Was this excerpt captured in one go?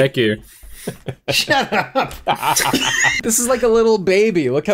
no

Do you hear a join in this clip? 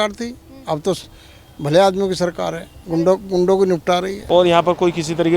yes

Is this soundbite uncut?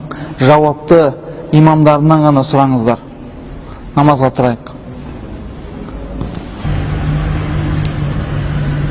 no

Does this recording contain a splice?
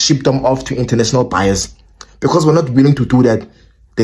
no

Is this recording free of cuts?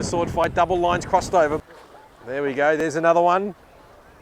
no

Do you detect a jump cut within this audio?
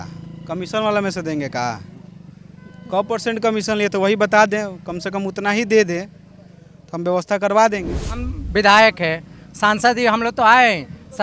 yes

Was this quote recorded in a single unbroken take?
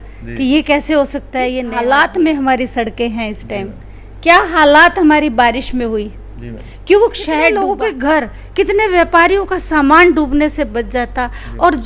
no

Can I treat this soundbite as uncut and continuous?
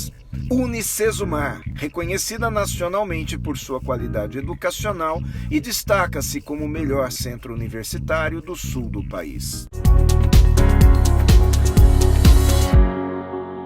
no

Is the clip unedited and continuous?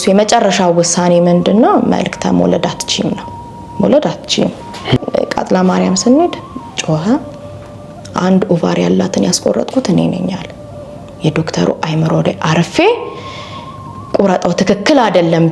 no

